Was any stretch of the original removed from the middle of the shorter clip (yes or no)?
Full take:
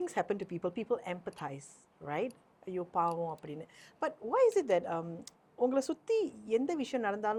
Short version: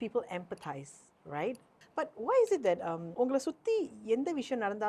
yes